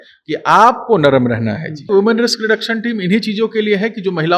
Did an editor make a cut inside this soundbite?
yes; 1 cut; at 1.9 s

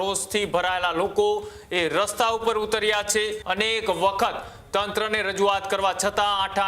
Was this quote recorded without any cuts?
no; 1 cut; at 3.4 s

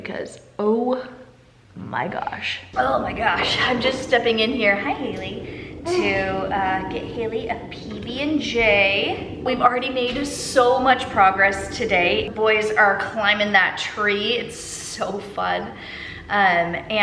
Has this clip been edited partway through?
no; 0 cuts

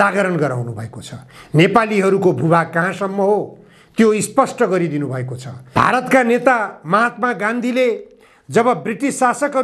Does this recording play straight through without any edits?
no; 1 cut; at 5.8 s

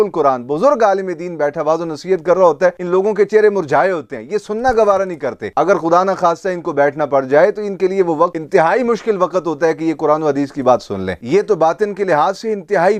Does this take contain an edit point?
no; 0 cuts

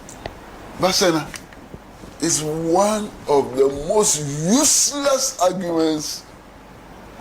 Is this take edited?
yes; 1 cut; at 4.4 s

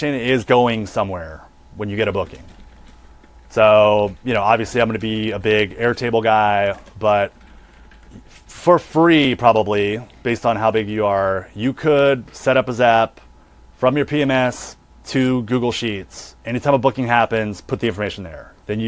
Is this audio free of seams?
yes; 0 cuts

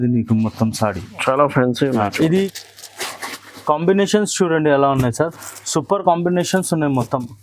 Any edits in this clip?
yes; 1 cut; at 2.5 s

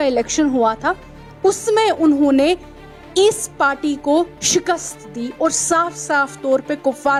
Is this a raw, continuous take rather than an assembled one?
yes; 0 cuts

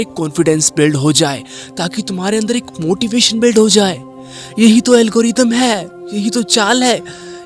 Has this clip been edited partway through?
no; 0 cuts

